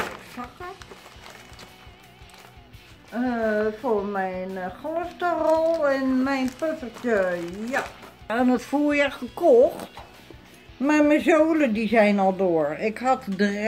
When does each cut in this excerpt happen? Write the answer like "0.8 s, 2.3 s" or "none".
8.3 s